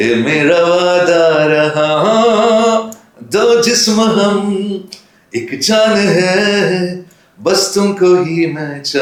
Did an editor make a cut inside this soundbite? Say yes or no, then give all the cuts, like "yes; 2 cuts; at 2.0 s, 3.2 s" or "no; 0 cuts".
no; 0 cuts